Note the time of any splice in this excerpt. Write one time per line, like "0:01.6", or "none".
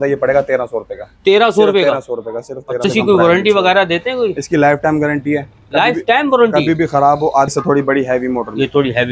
0:02.8
0:07.5